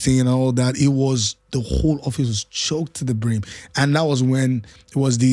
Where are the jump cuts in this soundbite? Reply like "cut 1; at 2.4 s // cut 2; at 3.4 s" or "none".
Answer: none